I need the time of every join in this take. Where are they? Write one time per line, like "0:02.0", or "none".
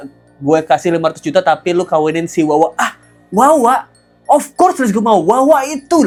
none